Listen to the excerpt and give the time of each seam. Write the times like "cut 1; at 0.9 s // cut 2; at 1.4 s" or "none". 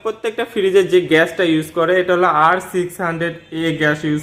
none